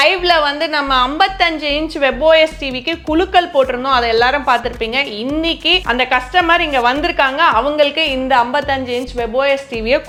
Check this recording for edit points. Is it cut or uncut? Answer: uncut